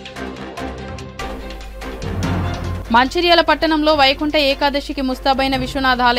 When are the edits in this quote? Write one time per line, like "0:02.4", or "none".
0:02.5